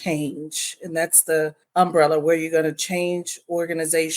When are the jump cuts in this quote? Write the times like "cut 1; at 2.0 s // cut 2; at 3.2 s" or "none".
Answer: cut 1; at 1.6 s